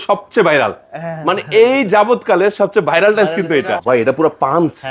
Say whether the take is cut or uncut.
cut